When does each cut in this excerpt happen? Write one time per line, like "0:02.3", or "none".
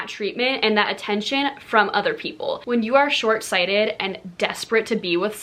0:02.6